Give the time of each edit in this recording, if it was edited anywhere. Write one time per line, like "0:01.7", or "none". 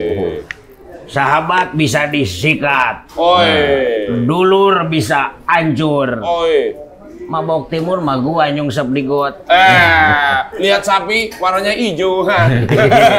none